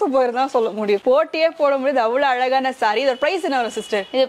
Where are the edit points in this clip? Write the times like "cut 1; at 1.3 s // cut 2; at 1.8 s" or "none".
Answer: none